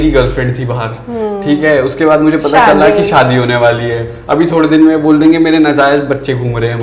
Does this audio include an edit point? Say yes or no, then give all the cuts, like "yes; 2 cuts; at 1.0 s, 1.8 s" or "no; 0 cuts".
no; 0 cuts